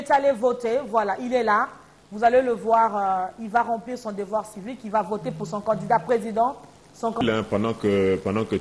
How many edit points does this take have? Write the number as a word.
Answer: one